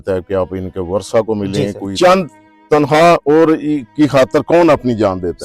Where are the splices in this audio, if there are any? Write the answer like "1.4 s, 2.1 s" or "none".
1.8 s